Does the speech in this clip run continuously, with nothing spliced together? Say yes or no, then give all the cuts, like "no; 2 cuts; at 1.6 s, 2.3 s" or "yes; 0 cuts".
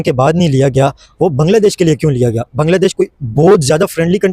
yes; 0 cuts